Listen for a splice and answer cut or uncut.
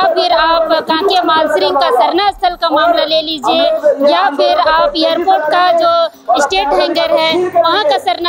uncut